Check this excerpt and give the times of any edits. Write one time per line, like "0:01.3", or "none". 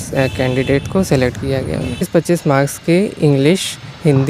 0:02.1